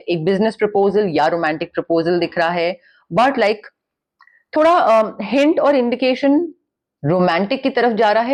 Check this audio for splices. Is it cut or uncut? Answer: uncut